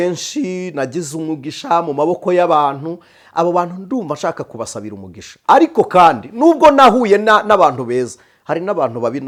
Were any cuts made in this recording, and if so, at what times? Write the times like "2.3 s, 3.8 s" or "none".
none